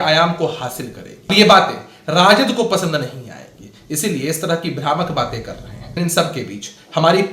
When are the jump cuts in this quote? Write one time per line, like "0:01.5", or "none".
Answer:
0:01.3
0:05.9